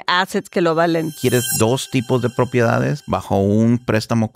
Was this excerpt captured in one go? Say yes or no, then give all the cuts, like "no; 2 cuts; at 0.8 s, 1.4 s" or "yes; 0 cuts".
no; 2 cuts; at 1.1 s, 3.0 s